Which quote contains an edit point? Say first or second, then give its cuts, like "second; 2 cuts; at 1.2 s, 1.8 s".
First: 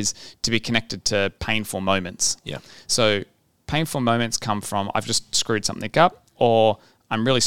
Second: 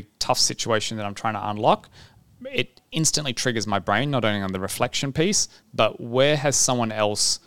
first; 1 cut; at 1.4 s